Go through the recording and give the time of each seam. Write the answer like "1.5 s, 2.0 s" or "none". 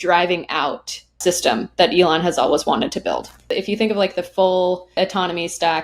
1.2 s, 3.5 s, 5.0 s